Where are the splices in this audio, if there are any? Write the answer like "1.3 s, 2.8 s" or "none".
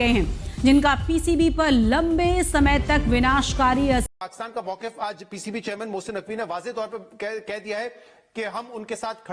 4.1 s